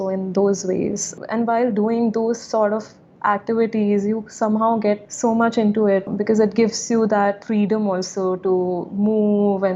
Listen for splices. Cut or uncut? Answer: cut